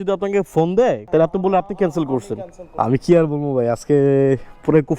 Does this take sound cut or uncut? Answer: cut